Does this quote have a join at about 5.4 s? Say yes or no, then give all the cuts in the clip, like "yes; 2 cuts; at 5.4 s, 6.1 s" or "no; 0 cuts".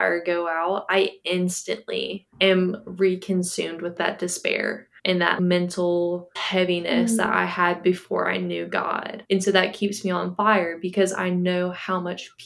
yes; 3 cuts; at 3.9 s, 5.4 s, 6.4 s